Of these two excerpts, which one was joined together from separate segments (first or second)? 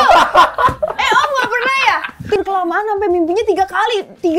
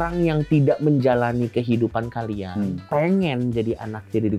first